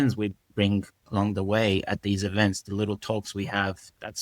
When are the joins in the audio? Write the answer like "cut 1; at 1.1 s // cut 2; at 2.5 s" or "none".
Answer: cut 1; at 1.0 s